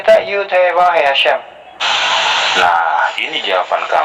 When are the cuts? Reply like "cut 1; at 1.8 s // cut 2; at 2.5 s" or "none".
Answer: cut 1; at 1.9 s